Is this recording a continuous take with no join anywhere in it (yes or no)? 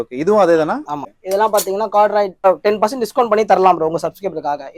no